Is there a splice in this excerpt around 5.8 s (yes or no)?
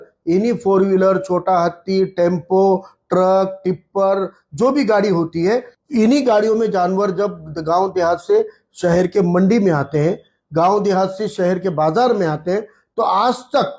yes